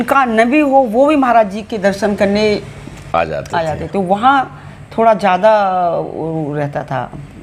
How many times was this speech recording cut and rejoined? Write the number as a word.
zero